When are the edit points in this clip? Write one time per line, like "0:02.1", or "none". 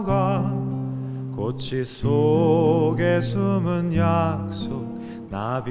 none